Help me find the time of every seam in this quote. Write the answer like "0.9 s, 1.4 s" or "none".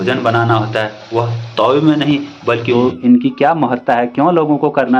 2.7 s